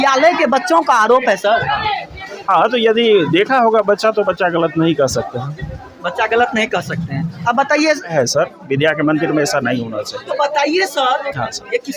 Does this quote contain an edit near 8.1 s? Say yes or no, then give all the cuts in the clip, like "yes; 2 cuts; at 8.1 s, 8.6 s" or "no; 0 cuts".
yes; 1 cut; at 8.1 s